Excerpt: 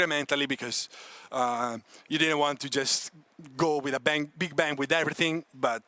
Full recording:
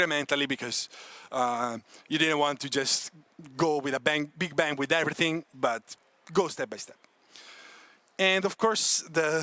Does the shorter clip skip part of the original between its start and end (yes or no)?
no